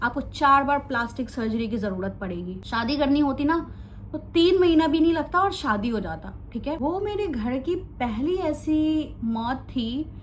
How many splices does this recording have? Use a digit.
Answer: 2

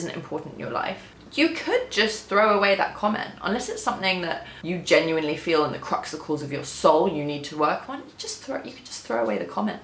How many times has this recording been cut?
2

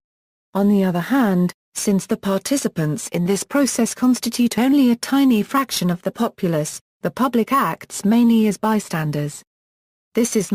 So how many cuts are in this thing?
1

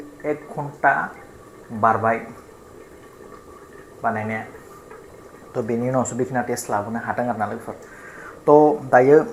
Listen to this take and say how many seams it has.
0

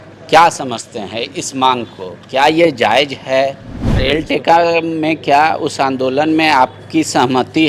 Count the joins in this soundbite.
1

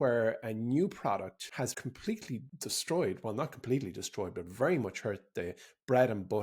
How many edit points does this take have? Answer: 2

